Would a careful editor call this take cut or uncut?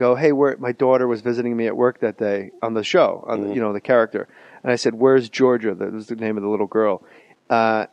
uncut